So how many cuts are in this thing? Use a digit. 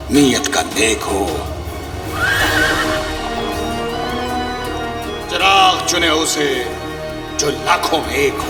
0